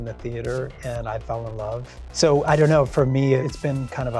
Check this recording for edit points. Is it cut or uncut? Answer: cut